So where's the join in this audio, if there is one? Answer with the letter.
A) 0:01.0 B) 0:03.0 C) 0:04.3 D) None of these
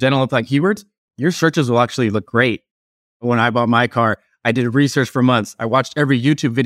B